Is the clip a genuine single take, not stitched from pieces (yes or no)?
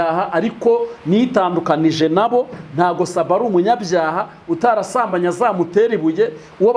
yes